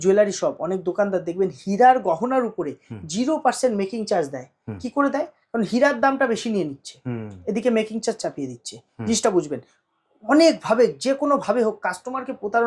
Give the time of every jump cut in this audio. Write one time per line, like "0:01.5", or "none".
none